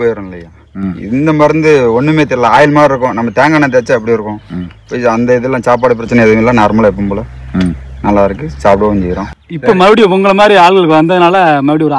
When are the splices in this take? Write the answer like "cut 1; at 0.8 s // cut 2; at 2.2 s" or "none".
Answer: cut 1; at 9.3 s

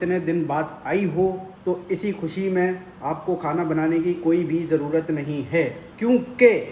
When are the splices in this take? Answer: none

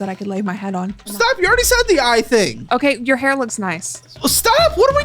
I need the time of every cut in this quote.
cut 1; at 1.1 s // cut 2; at 2.6 s

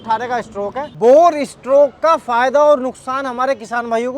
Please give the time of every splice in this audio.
cut 1; at 0.9 s

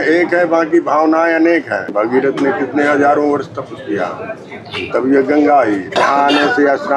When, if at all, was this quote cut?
cut 1; at 1.9 s // cut 2; at 6.0 s

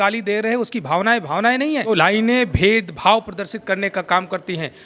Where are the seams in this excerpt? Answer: cut 1; at 1.9 s

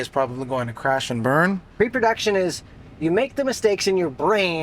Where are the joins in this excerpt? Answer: cut 1; at 1.7 s

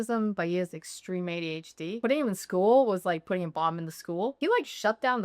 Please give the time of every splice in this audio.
cut 1; at 2.0 s // cut 2; at 4.3 s

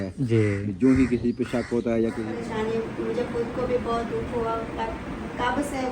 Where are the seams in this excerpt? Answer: cut 1; at 2.3 s

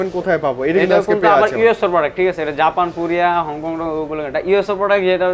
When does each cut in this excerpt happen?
none

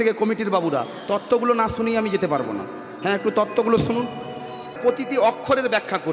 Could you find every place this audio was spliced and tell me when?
cut 1; at 4.8 s

